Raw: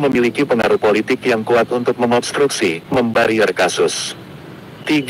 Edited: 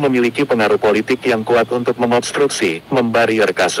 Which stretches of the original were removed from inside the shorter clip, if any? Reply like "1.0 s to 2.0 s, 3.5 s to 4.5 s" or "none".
none

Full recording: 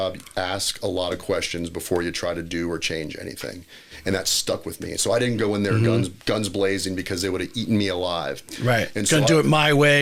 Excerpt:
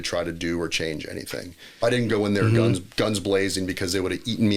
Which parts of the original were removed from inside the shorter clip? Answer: 3.9 s to 5.1 s

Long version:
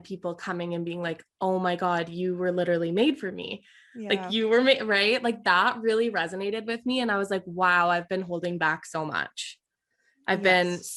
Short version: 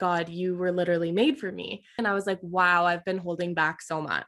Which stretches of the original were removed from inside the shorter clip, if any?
3.8 s to 7.0 s

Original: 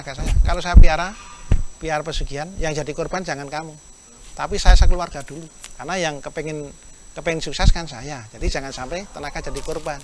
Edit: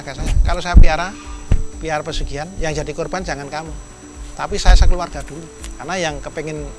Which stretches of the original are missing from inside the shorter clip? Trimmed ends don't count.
none

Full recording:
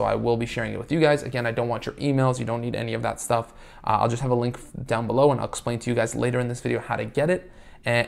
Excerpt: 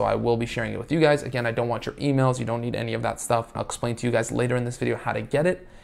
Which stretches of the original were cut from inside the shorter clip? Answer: 3.7 s to 5.5 s

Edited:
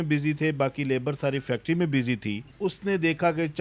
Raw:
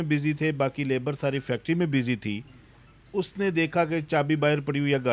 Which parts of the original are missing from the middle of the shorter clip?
2.5 s to 3.0 s

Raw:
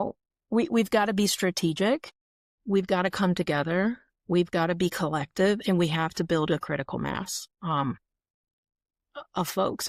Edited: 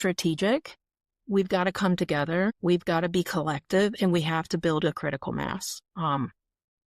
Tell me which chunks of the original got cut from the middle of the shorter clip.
3.9 s to 4.2 s

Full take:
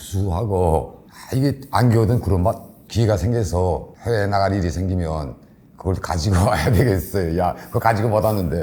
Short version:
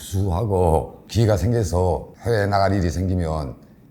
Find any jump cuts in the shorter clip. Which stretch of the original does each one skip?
1.0 s to 2.8 s

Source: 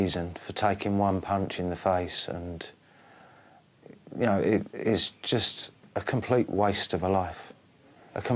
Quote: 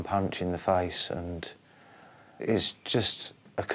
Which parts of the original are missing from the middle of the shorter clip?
3.5 s to 4.7 s

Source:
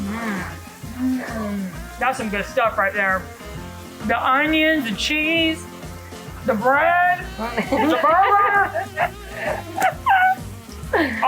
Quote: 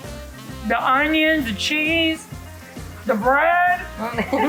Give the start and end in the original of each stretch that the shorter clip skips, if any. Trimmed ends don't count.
none

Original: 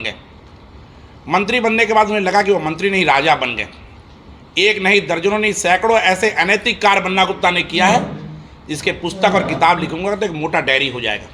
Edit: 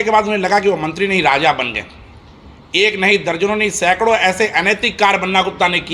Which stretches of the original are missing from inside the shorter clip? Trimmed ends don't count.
none

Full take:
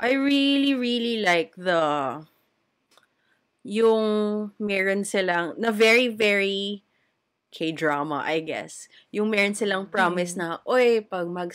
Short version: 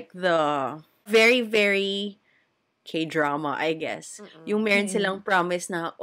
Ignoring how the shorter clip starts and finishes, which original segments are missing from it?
2.5 s to 5.7 s

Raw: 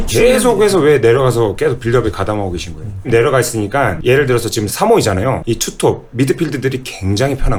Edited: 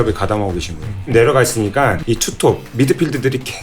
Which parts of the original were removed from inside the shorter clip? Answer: 4.0 s to 5.4 s

